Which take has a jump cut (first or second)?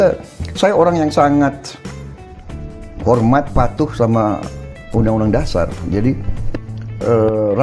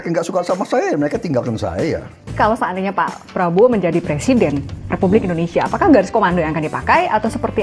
second